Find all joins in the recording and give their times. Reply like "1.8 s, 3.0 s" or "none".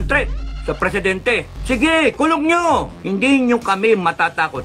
1.5 s, 2.9 s

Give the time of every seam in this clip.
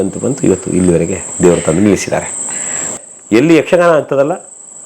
2.9 s

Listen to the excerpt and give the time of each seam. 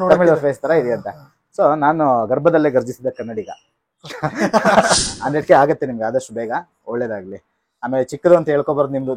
5.1 s

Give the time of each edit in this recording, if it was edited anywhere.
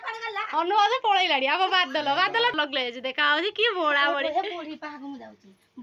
2.5 s

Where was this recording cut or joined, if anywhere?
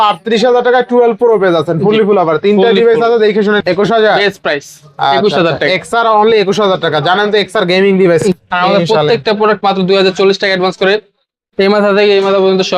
3.6 s, 8.2 s

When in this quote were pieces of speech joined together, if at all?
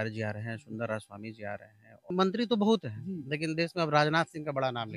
2.1 s

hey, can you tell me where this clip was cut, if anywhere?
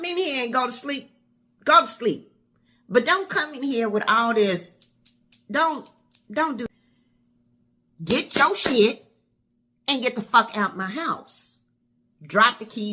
6.7 s

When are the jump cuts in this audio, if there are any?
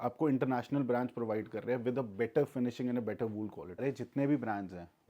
3.8 s

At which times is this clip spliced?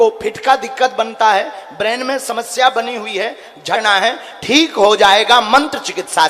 3.8 s

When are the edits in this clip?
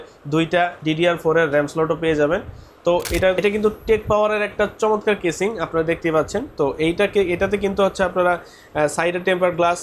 3.4 s

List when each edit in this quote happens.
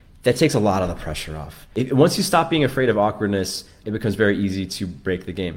1.6 s, 3.8 s

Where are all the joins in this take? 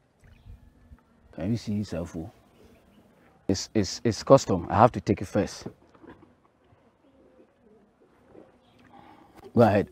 1.3 s, 3.5 s

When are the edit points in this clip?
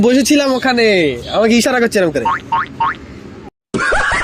none

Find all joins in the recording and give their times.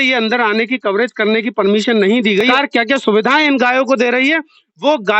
2.5 s

